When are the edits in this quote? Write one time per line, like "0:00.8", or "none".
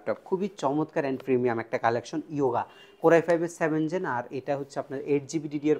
none